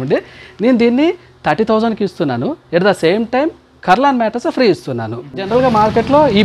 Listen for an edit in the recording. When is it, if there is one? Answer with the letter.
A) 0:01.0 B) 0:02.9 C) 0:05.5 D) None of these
C